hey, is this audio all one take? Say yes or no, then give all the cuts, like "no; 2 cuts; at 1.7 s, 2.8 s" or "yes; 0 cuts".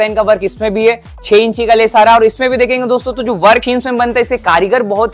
no; 1 cut; at 3.6 s